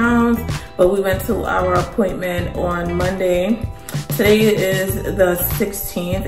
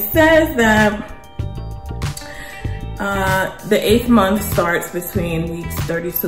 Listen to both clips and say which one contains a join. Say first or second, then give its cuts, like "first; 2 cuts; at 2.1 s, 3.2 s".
second; 2 cuts; at 1.2 s, 3.0 s